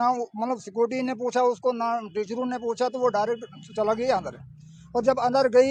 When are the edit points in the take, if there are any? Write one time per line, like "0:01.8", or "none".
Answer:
none